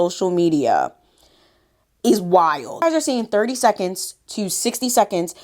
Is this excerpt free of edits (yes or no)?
no